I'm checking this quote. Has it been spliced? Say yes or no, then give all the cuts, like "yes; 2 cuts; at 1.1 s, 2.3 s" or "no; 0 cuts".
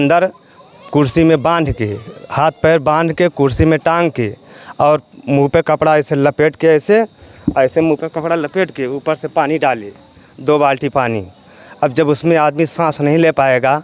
no; 0 cuts